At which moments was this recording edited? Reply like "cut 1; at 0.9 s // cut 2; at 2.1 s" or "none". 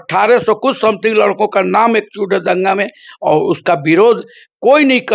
none